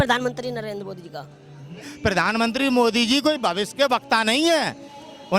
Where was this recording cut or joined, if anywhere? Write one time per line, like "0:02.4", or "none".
0:01.9